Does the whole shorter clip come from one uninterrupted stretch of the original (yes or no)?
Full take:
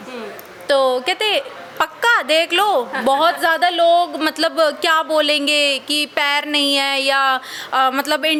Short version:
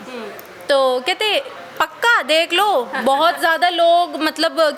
yes